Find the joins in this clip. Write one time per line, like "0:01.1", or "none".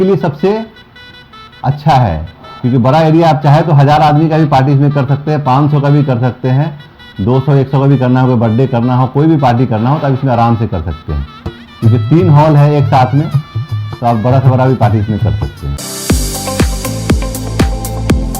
0:15.7